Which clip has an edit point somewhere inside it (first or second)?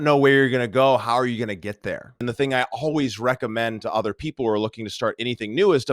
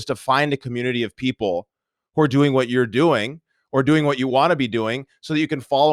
first